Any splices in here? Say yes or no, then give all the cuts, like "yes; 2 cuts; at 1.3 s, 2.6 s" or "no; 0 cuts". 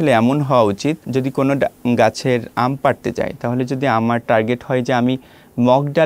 yes; 1 cut; at 1.0 s